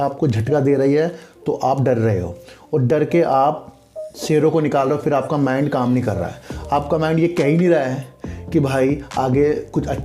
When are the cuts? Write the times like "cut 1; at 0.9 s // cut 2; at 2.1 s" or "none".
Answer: none